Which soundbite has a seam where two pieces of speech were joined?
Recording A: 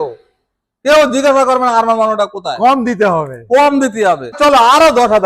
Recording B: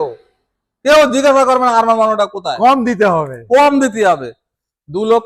A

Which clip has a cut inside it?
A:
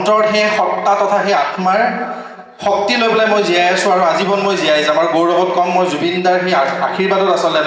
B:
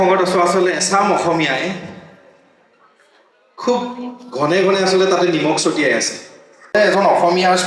B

